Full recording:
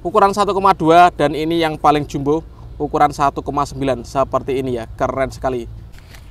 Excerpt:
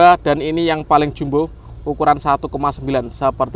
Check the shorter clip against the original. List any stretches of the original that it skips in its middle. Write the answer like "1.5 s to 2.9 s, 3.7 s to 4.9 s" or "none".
none